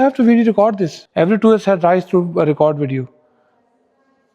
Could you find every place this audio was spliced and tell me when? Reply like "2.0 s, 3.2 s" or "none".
0.9 s

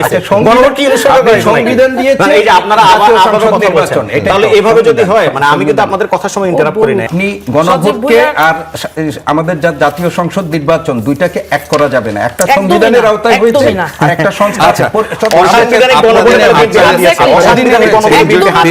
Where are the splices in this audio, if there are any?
7.1 s

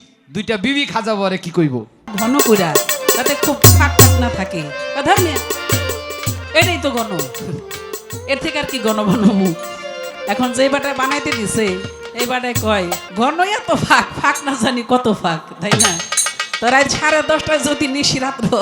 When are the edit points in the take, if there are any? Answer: 2.1 s, 13.1 s

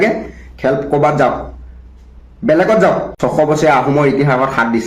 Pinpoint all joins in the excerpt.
3.2 s

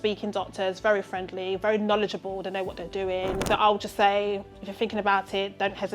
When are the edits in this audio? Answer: 3.4 s

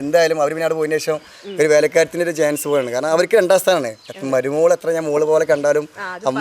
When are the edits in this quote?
none

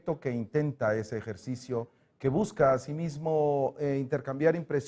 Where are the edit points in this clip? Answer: 3.2 s

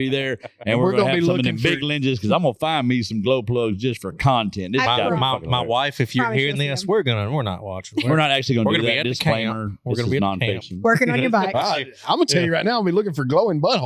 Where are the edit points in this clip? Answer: none

